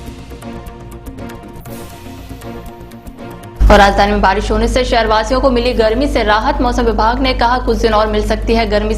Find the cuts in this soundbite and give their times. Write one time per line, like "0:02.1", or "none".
0:01.0
0:03.6